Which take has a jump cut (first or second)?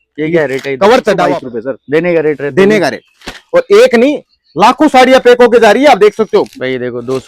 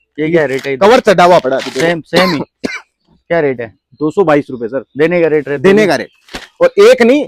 first